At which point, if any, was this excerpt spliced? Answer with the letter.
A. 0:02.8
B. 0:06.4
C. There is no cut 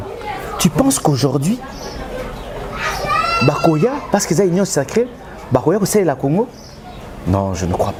C